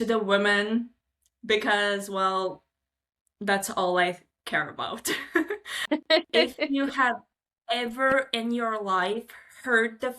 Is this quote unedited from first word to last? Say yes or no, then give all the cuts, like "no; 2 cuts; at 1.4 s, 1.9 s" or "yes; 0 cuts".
no; 1 cut; at 5.8 s